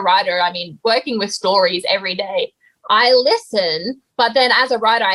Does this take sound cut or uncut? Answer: uncut